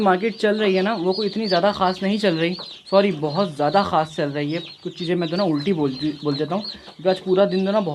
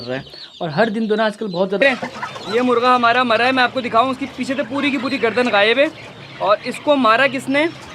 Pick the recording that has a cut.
second; 1 cut; at 1.8 s

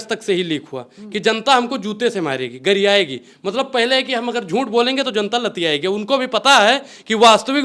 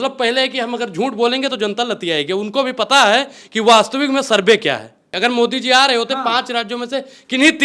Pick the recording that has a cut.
second; 1 cut; at 5.0 s

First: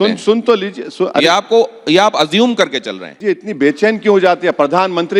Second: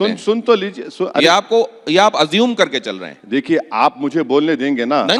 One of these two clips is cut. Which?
first; 1 cut; at 3.2 s

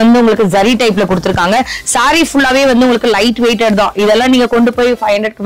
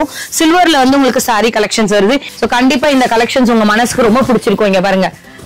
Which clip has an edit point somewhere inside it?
second; 1 cut; at 2.3 s

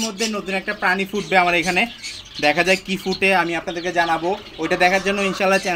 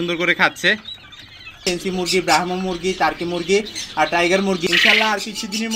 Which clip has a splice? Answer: second; 2 cuts; at 1.6 s, 4.6 s

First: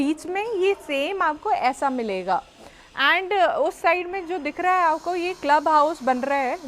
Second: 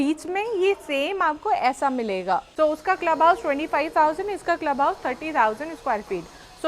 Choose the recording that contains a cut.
second; 1 cut; at 2.5 s

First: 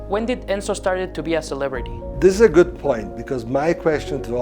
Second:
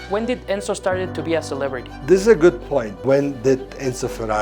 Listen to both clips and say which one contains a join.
second; 2 cuts; at 1.9 s, 2.9 s

